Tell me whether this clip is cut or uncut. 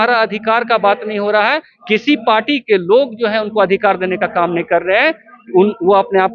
uncut